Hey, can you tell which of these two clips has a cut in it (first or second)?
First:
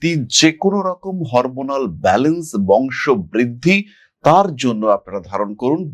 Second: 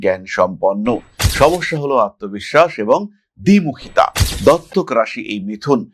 second